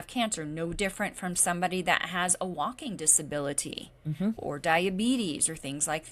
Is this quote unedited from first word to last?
yes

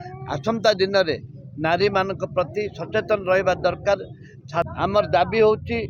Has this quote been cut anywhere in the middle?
yes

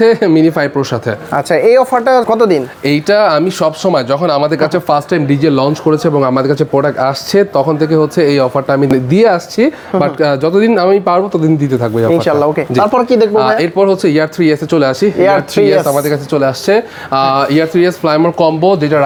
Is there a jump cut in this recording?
no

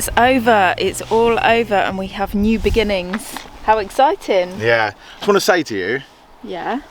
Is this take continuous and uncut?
yes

